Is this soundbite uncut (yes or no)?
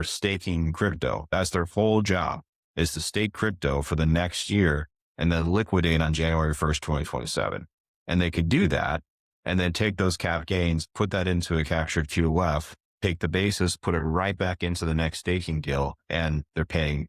yes